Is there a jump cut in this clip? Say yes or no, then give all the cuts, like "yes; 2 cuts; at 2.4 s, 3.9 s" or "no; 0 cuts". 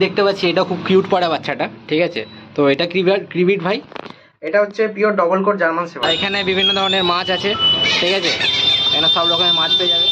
yes; 1 cut; at 6.0 s